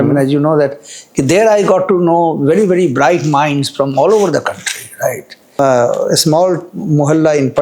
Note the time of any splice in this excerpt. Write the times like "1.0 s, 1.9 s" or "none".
5.6 s